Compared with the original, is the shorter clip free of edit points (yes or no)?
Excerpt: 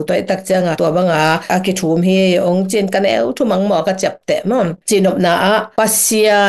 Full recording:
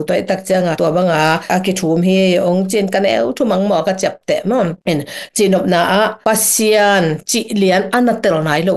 no